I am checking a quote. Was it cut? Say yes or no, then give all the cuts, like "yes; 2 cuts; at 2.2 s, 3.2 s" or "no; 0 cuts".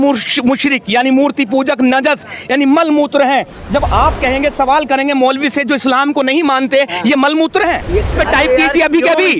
yes; 1 cut; at 8.1 s